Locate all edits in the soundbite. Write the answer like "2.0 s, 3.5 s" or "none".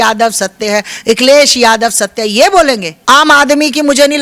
2.9 s